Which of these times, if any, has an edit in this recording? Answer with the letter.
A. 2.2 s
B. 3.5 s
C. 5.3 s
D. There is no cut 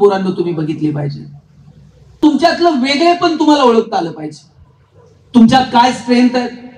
A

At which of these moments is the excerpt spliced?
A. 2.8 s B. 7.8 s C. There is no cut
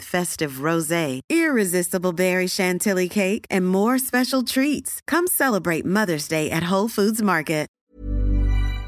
B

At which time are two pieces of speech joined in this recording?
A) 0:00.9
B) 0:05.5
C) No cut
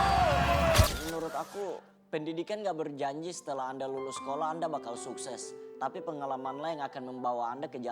A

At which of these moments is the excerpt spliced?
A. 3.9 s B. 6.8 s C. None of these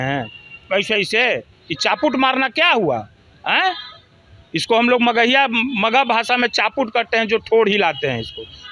C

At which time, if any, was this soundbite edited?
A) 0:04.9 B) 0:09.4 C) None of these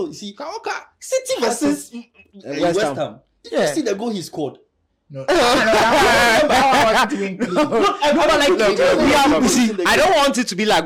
C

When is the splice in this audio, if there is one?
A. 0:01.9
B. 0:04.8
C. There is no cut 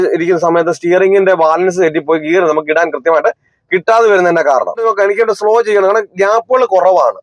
B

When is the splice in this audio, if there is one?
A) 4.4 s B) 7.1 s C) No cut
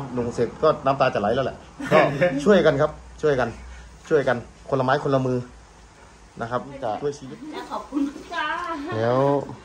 B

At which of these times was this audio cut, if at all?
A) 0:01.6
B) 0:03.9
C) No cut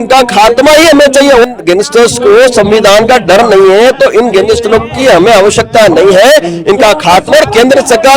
C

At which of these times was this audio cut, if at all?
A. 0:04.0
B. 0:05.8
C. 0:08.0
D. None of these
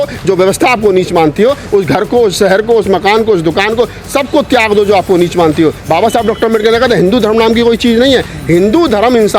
B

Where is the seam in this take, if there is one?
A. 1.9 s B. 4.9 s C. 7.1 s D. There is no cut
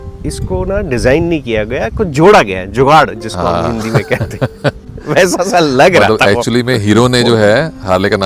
D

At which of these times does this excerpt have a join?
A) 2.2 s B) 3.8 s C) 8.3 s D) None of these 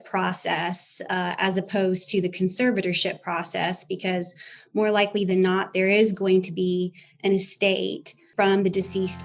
C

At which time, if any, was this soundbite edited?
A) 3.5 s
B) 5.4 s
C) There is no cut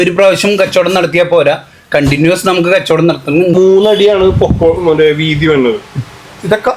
A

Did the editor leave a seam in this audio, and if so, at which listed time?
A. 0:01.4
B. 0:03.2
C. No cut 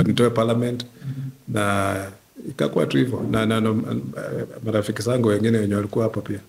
C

